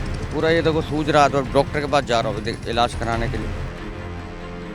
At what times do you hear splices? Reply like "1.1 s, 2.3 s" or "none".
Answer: none